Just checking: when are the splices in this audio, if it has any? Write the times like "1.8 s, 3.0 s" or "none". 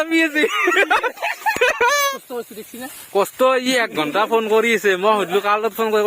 2.1 s